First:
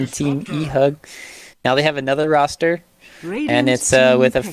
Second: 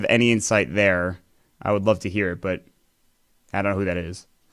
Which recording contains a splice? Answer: second; 1 cut; at 1.6 s

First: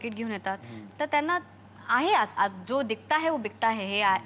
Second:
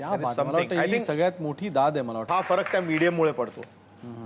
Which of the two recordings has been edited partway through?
second; 1 cut; at 2.2 s

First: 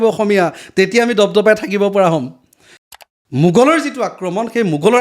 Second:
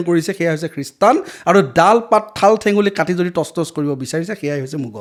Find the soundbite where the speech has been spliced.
first; 1 cut; at 2.6 s

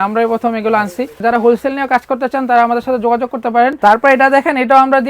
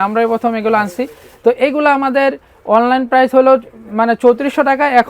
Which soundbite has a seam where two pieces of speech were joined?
first; 2 cuts; at 1.2 s, 3.8 s

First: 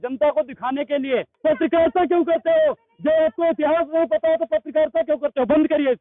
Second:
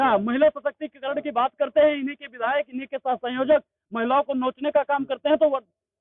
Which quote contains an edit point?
first; 1 cut; at 1.3 s

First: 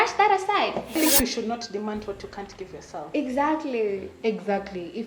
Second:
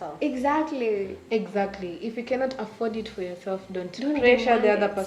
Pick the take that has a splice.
first; 1 cut; at 0.9 s

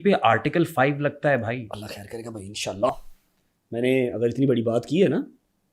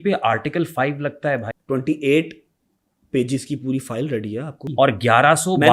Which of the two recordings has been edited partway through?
second; 2 cuts; at 1.5 s, 4.7 s

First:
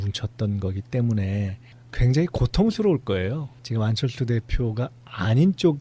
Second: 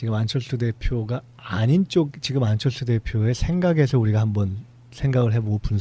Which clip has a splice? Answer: first; 1 cut; at 1.6 s

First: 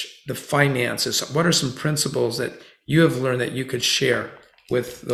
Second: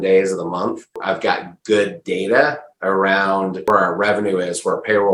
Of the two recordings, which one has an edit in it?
second; 2 cuts; at 1.0 s, 3.7 s

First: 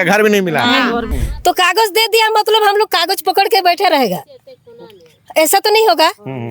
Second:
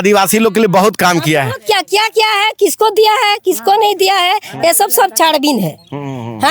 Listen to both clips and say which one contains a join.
first; 1 cut; at 1.1 s

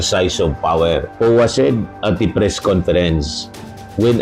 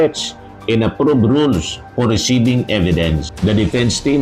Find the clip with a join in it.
first; 1 cut; at 1.1 s

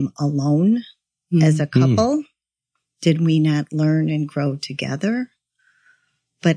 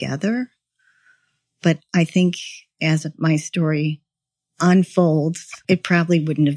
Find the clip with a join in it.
second; 1 cut; at 5.6 s

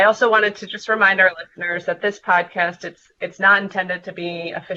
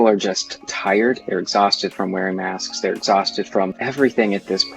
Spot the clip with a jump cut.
second; 2 cuts; at 1.2 s, 3.8 s

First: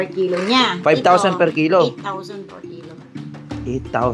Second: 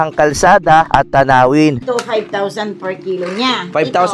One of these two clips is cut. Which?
second; 2 cuts; at 0.9 s, 1.8 s

